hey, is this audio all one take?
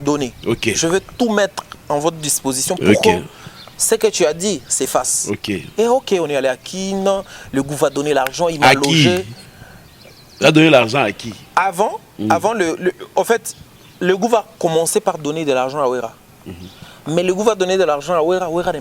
yes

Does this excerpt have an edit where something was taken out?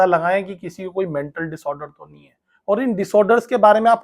no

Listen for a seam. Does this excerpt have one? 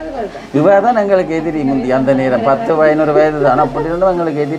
no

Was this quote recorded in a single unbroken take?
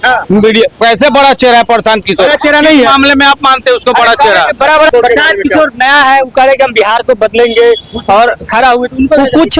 no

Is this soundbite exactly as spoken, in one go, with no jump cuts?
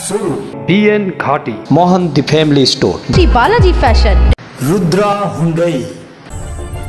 yes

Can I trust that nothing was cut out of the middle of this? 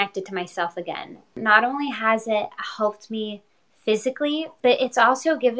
no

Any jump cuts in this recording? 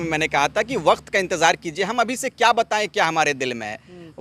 no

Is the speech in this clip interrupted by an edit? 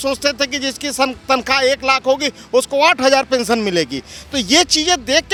no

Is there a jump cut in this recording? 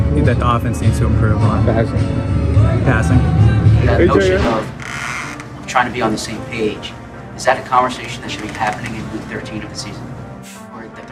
no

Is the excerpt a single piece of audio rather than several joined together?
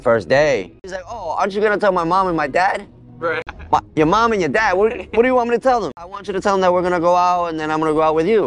no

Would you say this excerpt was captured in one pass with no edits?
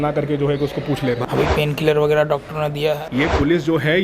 no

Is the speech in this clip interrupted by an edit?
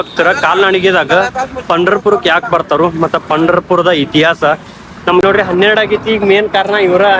yes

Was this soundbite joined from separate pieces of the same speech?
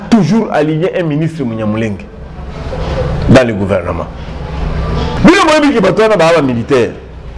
yes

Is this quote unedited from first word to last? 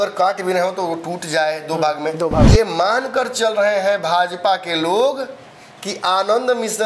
no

